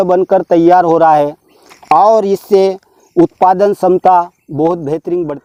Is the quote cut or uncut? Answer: uncut